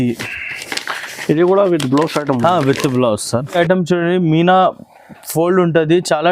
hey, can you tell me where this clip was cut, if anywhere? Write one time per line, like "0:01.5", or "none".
0:03.6